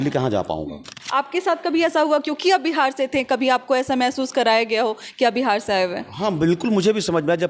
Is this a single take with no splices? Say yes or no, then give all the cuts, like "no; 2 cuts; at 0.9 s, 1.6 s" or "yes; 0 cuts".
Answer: no; 1 cut; at 1.0 s